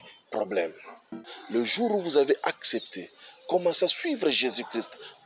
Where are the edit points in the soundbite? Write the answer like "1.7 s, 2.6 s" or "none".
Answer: 1.3 s